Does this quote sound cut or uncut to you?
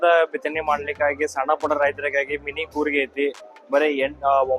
uncut